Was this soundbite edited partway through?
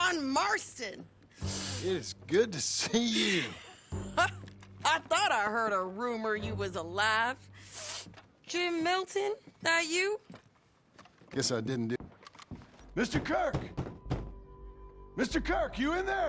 yes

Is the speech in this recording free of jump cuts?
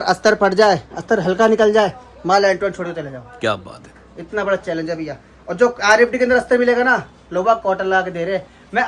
yes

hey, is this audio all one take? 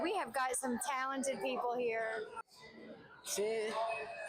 no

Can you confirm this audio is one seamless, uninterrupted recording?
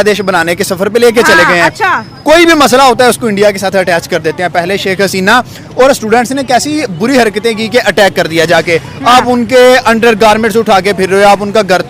yes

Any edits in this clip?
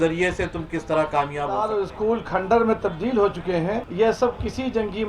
yes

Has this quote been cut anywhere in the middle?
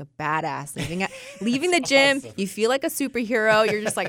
no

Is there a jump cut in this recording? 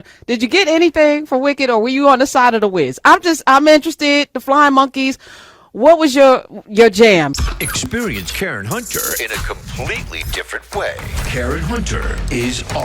yes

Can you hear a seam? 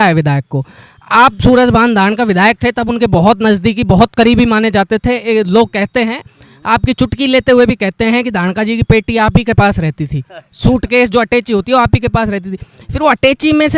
no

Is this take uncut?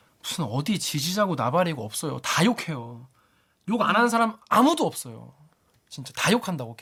yes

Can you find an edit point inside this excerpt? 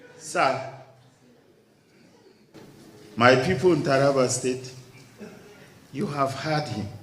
no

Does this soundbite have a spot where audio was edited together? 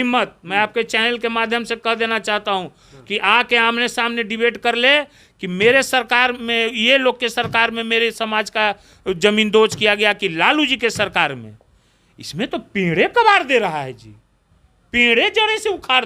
no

